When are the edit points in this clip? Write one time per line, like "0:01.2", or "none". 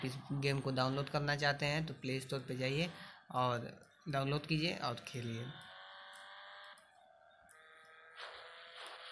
none